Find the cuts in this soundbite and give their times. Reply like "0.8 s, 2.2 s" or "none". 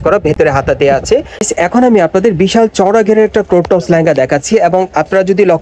1.5 s